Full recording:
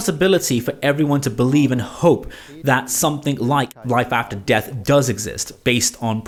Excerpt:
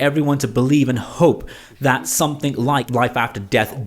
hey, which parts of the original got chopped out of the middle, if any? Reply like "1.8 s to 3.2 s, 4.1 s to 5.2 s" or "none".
3.7 s to 3.8 s